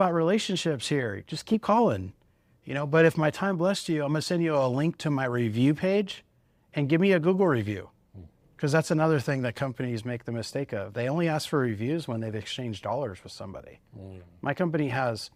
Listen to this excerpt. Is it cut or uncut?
uncut